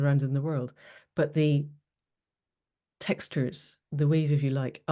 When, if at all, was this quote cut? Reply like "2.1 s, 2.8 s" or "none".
none